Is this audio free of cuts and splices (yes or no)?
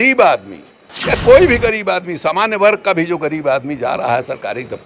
no